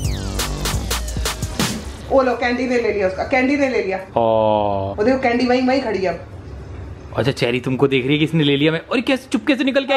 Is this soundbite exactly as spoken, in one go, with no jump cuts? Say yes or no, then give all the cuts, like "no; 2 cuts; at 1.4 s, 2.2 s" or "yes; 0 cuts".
no; 2 cuts; at 4.0 s, 4.9 s